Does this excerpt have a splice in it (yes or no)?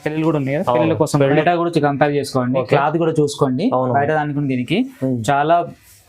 yes